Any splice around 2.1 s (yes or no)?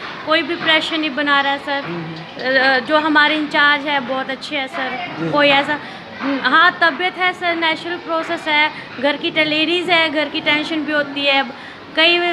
no